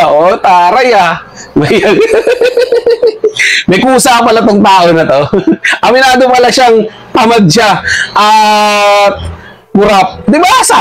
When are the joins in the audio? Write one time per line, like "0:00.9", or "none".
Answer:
none